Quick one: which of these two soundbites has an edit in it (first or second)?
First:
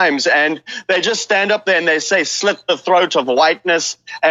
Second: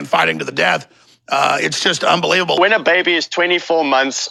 second